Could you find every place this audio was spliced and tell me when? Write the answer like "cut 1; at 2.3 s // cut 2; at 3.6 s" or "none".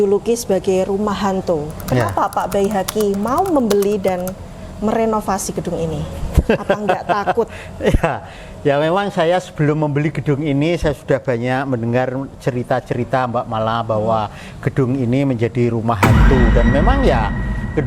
none